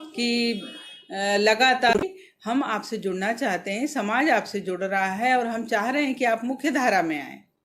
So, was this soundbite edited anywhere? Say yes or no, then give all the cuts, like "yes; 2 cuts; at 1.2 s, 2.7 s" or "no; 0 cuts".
yes; 1 cut; at 2.0 s